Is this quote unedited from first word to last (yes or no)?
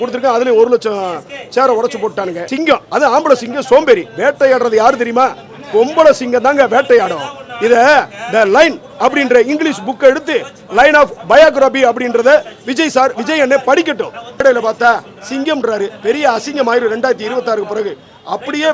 no